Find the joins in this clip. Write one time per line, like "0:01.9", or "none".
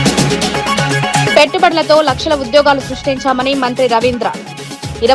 none